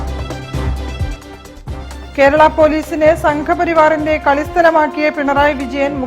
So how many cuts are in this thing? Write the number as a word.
one